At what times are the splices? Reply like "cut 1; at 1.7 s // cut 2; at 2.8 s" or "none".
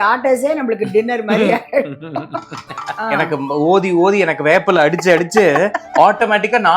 cut 1; at 2.9 s